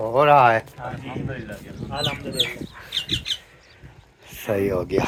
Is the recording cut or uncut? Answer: uncut